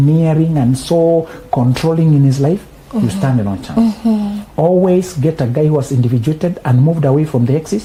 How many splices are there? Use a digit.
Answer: 0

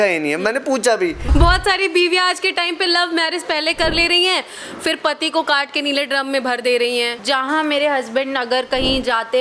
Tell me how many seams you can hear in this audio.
2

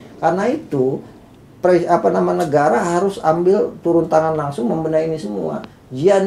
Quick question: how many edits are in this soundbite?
0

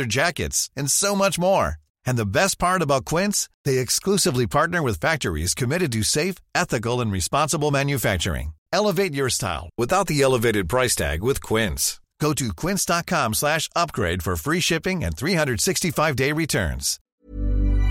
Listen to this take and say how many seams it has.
1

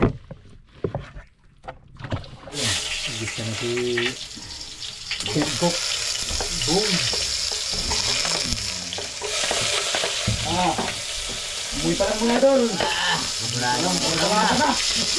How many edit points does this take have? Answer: 1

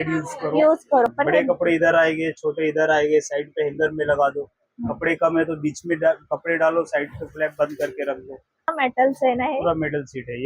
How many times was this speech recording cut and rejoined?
2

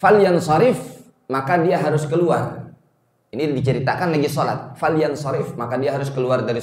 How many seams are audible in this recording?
0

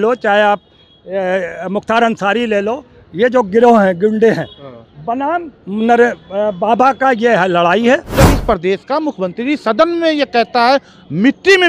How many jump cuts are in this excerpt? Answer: 1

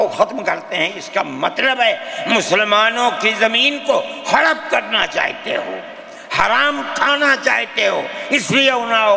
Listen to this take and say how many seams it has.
0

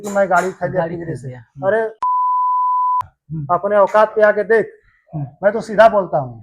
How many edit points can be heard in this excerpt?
1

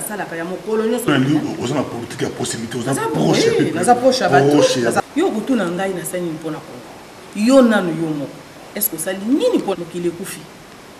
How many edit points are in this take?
3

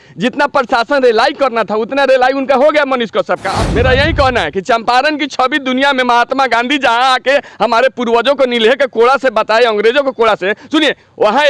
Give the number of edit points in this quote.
1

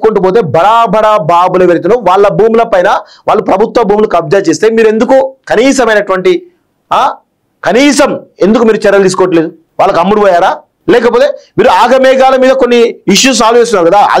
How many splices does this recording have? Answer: 2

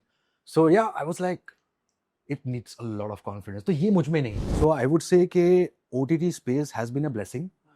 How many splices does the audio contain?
1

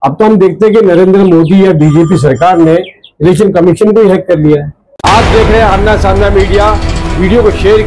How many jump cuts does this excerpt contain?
1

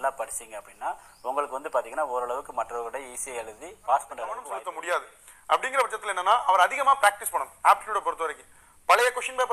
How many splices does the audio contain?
1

